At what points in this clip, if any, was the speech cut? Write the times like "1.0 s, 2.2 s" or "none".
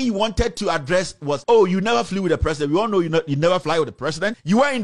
1.4 s, 3.8 s